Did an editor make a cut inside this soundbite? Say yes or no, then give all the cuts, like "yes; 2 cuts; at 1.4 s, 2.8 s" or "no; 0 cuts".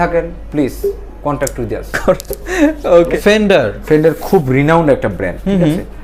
yes; 1 cut; at 3.1 s